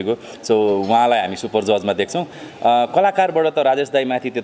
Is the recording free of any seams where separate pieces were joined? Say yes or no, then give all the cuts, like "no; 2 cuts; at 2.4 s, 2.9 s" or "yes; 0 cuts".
yes; 0 cuts